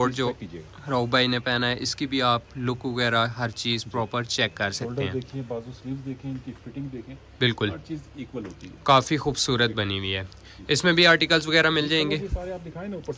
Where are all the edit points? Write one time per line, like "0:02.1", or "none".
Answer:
none

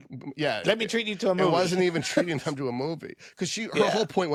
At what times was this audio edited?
none

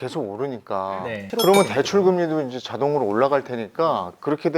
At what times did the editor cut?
0:01.4

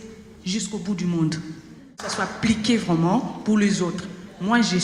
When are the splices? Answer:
0:02.0

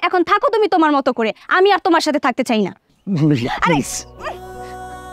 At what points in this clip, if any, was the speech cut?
0:02.7

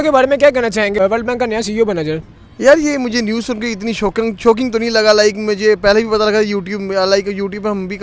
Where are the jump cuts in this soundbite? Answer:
0:01.0

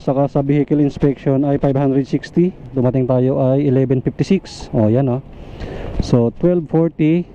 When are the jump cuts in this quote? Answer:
0:02.7

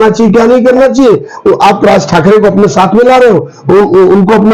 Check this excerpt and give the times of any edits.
none

